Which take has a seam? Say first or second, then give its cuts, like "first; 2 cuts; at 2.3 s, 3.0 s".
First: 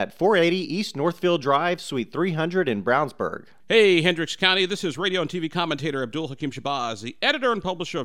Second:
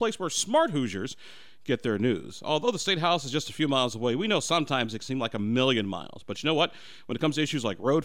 first; 1 cut; at 3.5 s